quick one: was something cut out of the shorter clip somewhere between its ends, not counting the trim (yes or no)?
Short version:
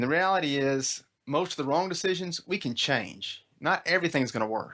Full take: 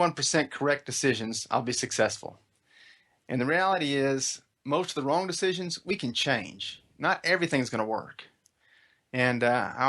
no